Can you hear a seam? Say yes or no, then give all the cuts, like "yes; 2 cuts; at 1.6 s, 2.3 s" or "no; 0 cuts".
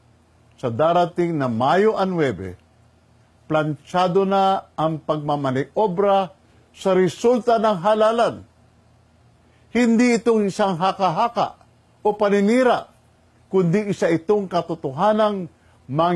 no; 0 cuts